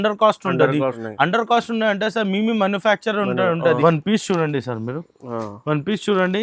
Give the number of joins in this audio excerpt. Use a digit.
2